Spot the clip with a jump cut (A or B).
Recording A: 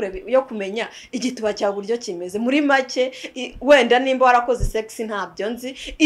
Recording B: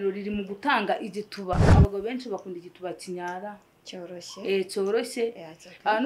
B